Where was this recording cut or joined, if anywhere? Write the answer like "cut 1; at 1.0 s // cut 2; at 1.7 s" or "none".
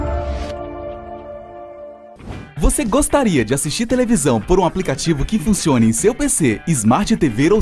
none